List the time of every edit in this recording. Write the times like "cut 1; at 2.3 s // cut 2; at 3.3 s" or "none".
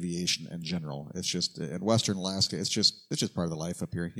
cut 1; at 3.1 s